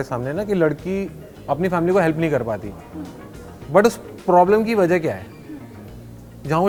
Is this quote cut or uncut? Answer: uncut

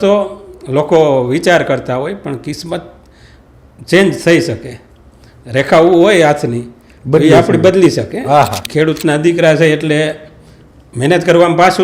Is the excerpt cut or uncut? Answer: cut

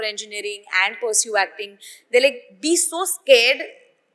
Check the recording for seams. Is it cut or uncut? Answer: uncut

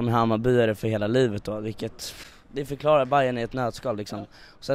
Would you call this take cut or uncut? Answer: uncut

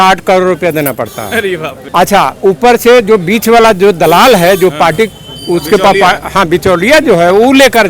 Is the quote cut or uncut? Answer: uncut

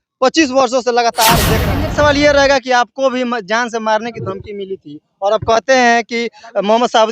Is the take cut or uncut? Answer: cut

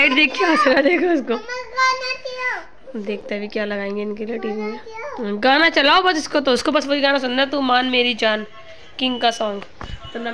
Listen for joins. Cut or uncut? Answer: uncut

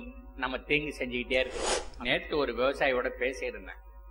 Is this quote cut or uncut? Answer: cut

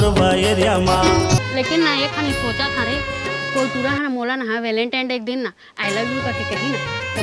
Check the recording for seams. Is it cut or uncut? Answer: cut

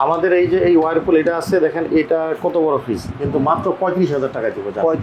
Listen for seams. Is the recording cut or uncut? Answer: uncut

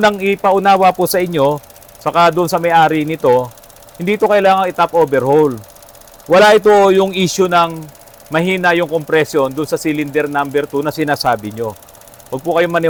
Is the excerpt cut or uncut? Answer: uncut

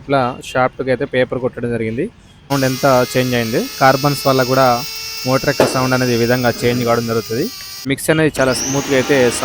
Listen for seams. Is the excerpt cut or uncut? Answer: cut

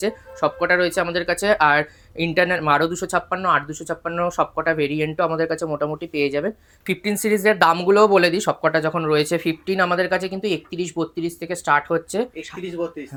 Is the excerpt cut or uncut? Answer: uncut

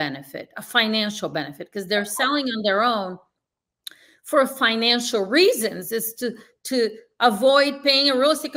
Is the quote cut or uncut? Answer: uncut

